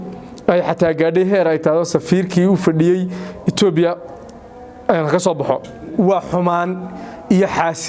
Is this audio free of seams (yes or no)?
no